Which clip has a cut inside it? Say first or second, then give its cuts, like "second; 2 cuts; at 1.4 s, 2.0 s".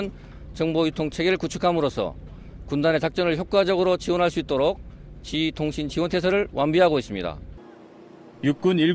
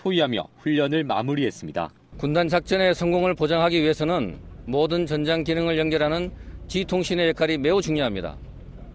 first; 1 cut; at 4.3 s